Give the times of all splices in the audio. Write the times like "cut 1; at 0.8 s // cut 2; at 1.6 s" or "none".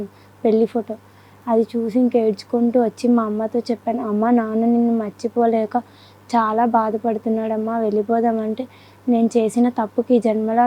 none